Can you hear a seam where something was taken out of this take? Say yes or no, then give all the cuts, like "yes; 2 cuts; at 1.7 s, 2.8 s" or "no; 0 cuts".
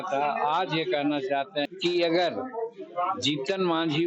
yes; 1 cut; at 1.7 s